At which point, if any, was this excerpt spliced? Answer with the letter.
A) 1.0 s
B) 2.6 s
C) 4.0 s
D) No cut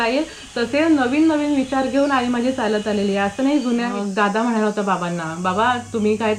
C